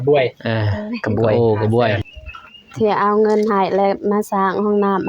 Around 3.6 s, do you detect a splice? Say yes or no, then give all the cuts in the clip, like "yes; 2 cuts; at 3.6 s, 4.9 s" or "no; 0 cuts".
no; 1 cut; at 2.0 s